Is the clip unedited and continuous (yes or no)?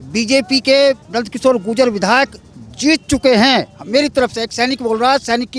yes